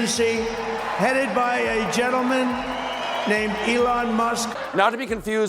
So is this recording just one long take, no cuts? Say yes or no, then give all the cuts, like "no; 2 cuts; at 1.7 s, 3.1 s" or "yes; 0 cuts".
no; 1 cut; at 4.6 s